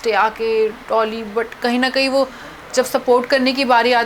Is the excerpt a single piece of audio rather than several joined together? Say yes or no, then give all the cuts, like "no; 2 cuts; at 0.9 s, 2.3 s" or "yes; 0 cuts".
yes; 0 cuts